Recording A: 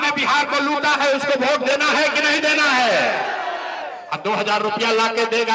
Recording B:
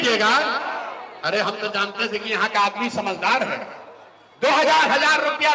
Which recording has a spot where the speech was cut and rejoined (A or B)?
A